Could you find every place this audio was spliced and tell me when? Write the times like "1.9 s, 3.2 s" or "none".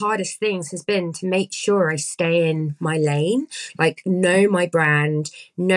none